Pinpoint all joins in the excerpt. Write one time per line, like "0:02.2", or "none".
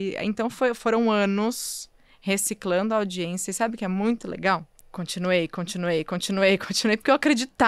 0:04.7